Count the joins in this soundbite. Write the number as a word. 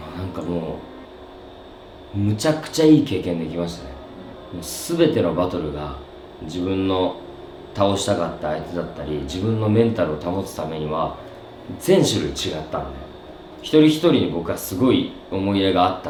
zero